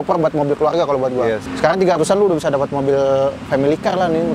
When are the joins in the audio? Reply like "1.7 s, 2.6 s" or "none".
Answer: 1.5 s